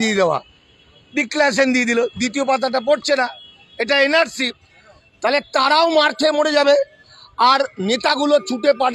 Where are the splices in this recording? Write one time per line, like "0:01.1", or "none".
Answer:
none